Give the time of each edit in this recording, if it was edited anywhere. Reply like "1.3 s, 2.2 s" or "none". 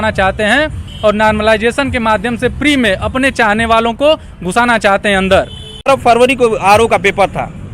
5.8 s

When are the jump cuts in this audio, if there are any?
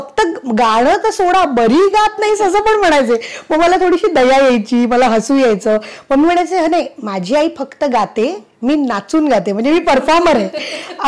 none

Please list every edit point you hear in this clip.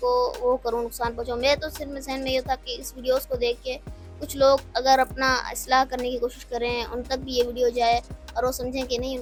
none

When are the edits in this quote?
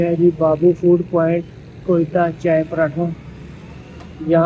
none

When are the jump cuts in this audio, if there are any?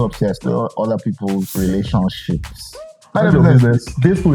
1.5 s, 3.0 s

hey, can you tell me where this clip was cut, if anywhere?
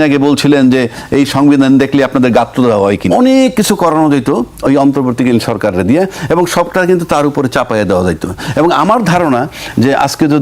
3.1 s

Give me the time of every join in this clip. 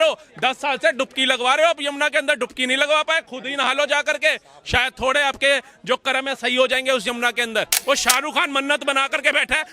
7.8 s

